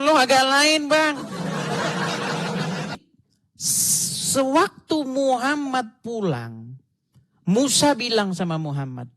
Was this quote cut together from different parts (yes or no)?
yes